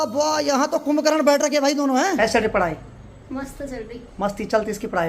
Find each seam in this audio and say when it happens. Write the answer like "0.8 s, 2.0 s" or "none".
2.2 s